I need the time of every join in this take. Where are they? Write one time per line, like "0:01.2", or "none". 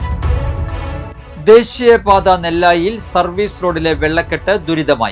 none